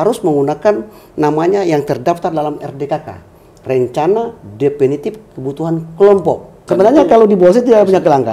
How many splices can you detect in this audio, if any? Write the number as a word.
one